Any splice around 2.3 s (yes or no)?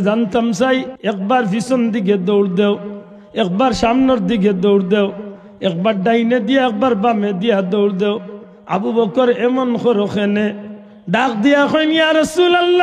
no